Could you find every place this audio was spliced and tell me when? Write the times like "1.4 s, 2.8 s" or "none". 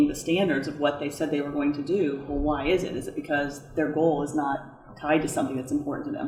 none